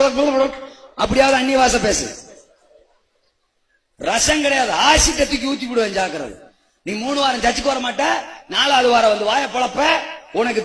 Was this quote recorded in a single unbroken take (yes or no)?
yes